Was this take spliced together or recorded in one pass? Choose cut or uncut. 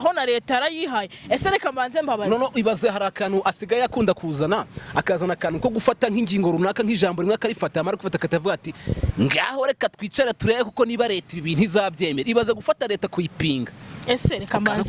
uncut